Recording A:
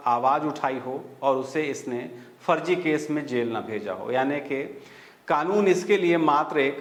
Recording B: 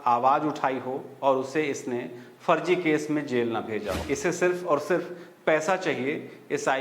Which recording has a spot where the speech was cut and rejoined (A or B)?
B